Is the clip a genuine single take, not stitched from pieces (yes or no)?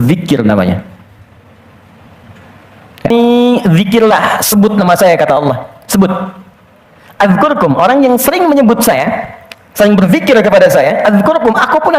no